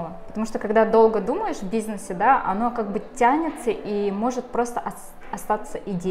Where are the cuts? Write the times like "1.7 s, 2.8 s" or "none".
none